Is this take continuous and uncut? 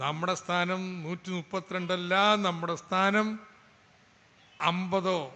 yes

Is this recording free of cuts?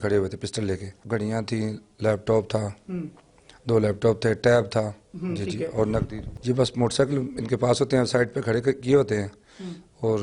no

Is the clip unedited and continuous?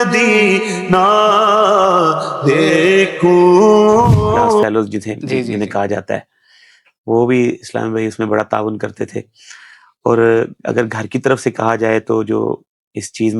no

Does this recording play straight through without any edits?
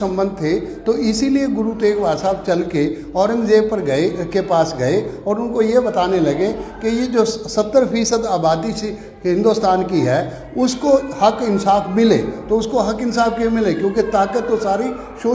yes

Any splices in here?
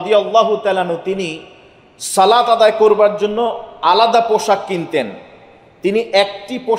no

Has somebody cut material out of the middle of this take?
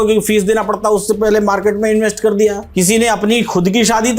yes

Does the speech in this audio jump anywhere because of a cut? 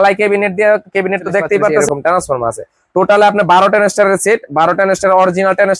yes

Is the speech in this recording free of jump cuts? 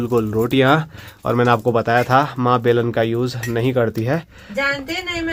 yes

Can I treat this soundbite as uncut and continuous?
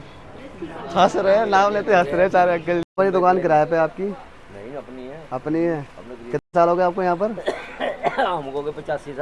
no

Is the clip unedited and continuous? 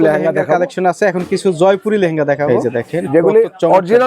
no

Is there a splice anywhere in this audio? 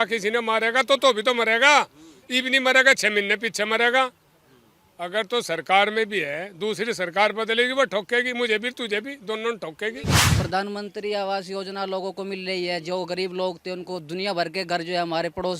yes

